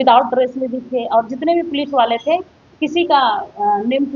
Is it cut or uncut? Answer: uncut